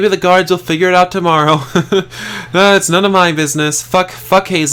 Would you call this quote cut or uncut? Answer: uncut